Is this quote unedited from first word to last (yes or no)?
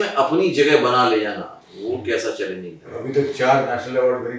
no